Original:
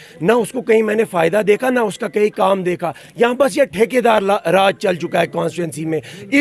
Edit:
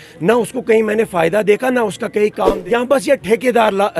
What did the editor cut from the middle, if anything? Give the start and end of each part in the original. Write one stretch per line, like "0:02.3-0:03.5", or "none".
0:02.6-0:03.1